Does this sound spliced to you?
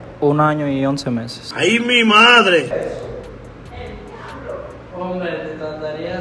yes; 1 cut; at 4.8 s

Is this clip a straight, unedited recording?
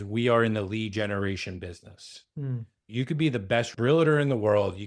no; 2 cuts; at 2.8 s, 3.7 s

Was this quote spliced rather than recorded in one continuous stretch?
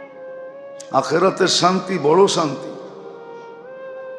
no; 0 cuts

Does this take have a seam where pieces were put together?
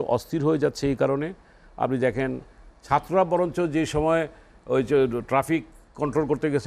no; 0 cuts

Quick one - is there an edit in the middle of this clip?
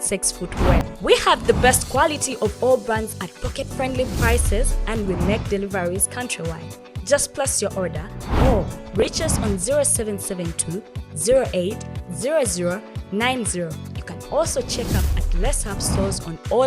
yes; 1 cut; at 0.9 s

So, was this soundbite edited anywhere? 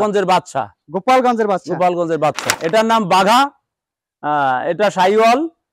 yes; 1 cut; at 2.4 s

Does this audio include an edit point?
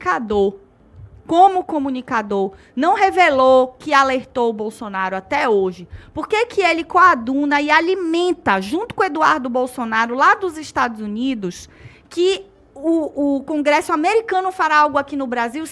no; 0 cuts

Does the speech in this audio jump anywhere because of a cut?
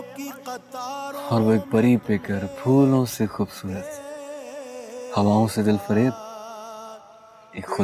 no; 0 cuts

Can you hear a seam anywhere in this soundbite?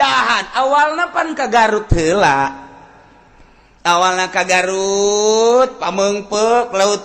no; 0 cuts

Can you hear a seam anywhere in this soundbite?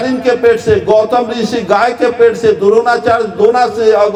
no; 0 cuts

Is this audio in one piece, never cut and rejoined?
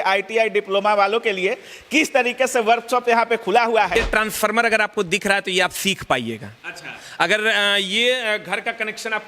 no; 1 cut; at 4.0 s

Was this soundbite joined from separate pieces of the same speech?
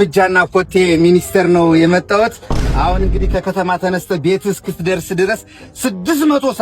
no; 0 cuts

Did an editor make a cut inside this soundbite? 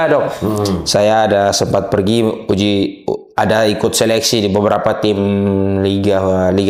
no; 0 cuts

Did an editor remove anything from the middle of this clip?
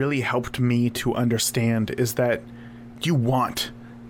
no; 0 cuts

